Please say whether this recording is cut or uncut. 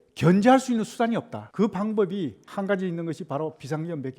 cut